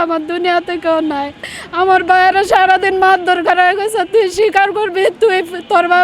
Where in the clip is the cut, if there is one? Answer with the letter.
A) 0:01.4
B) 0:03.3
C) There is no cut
A